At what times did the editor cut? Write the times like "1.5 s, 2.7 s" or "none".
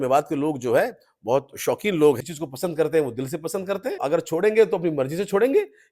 2.2 s, 4.0 s